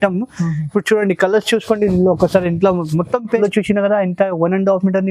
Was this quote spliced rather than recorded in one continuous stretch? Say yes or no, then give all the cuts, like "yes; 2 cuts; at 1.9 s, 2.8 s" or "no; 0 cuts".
yes; 1 cut; at 3.4 s